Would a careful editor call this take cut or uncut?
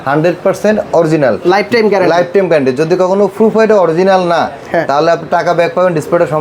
uncut